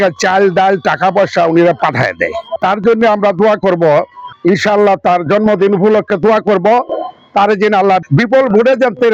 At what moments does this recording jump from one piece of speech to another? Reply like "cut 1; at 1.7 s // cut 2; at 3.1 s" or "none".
none